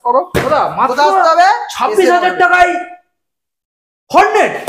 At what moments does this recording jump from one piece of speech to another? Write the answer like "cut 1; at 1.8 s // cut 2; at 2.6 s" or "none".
none